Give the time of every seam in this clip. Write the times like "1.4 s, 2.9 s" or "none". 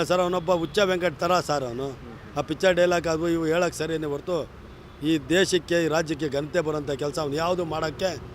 none